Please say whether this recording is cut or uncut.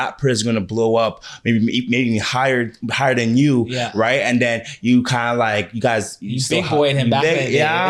uncut